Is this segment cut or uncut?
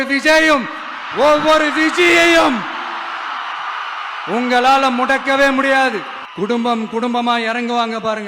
cut